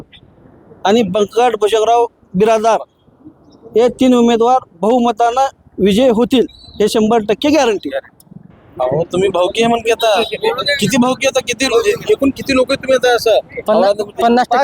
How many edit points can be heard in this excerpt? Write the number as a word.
one